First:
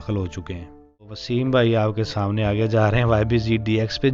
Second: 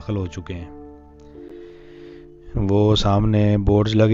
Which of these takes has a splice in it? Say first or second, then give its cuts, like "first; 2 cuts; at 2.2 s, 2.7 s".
first; 1 cut; at 1.2 s